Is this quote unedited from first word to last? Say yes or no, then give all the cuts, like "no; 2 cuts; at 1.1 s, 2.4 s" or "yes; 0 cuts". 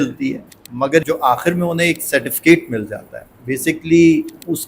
no; 1 cut; at 1.0 s